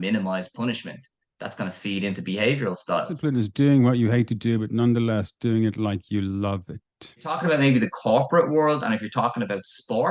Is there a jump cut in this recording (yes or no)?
yes